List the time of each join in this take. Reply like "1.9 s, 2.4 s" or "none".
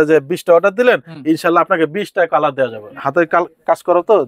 2.9 s